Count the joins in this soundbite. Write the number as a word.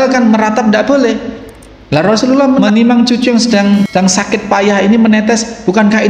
two